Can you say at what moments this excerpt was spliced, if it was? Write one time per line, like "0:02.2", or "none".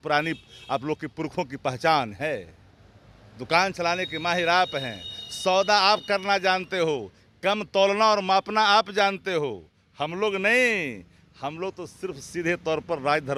none